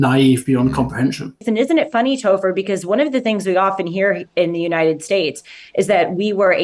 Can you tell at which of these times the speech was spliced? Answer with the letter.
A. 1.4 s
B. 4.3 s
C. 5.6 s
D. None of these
A